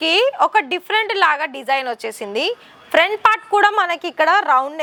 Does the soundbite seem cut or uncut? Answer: uncut